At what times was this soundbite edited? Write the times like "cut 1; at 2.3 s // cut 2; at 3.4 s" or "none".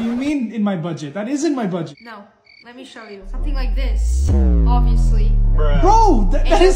cut 1; at 1.9 s